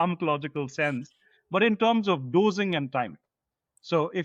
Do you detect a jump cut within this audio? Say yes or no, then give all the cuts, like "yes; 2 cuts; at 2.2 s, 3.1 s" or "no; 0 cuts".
no; 0 cuts